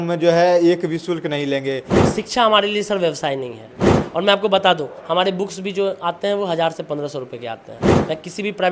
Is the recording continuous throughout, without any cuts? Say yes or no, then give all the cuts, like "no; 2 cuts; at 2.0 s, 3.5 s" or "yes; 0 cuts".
no; 1 cut; at 2.0 s